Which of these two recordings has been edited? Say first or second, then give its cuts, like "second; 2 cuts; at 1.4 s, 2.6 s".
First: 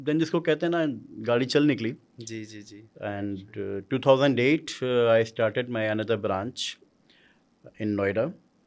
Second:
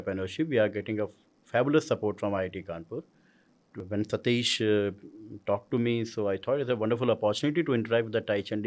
second; 1 cut; at 3.8 s